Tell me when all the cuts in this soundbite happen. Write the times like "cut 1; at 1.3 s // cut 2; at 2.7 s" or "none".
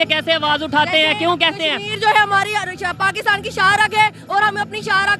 none